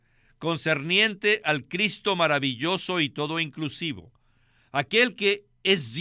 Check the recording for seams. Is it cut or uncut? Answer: uncut